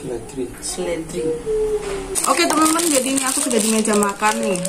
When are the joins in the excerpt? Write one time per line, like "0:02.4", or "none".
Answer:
0:02.2